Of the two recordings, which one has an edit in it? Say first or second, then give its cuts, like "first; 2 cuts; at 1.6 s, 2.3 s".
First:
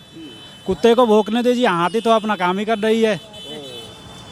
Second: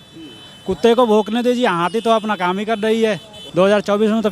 second; 1 cut; at 3.4 s